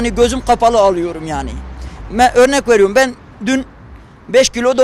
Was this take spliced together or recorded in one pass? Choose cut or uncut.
uncut